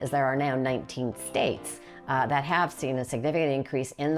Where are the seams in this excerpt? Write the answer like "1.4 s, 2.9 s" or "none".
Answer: none